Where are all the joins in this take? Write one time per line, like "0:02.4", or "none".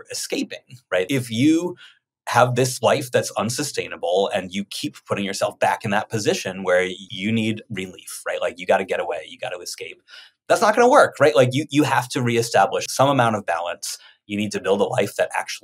0:01.1
0:07.1
0:12.9